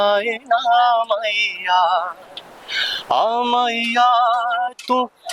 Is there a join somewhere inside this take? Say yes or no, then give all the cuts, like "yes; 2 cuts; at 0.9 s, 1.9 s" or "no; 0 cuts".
no; 0 cuts